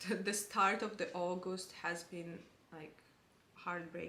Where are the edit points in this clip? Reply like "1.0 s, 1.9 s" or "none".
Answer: none